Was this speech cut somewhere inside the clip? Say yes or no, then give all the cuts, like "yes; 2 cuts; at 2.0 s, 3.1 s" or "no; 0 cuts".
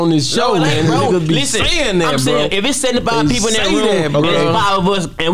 no; 0 cuts